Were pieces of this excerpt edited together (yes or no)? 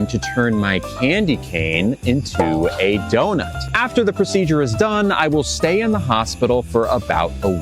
no